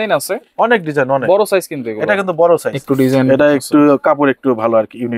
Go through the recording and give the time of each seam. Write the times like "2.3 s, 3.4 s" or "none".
2.7 s

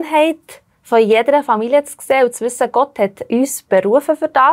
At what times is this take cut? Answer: 3.2 s

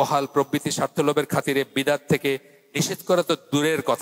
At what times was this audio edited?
none

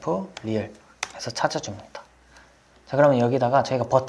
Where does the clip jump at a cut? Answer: none

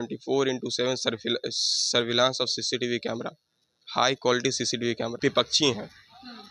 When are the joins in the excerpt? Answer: 5.1 s

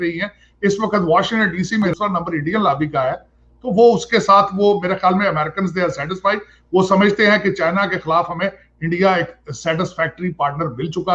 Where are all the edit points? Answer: 1.9 s

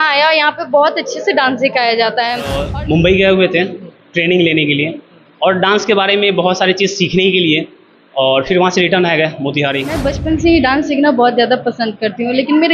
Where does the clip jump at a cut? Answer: 2.6 s, 10.1 s

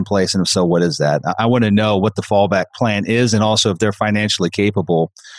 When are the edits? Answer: none

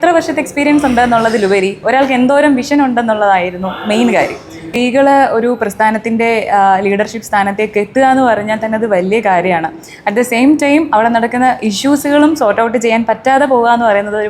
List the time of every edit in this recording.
4.7 s

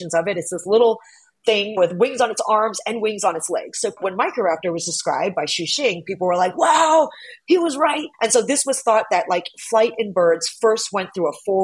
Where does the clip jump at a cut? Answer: 4.0 s

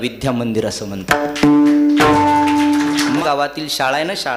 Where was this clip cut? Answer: 3.2 s

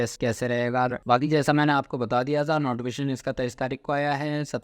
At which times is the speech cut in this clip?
1.0 s

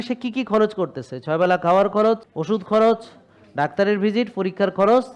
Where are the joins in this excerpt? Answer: 2.3 s

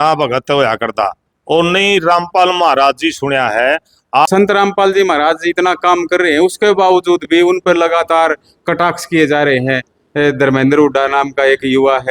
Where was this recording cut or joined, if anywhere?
none

